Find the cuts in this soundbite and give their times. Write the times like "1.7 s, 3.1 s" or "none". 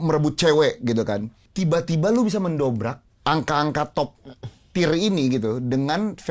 1.4 s, 3.1 s